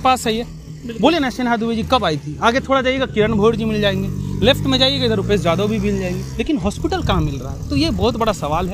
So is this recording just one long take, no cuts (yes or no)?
yes